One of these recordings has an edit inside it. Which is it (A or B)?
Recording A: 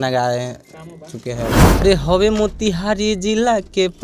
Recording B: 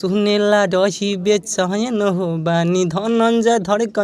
A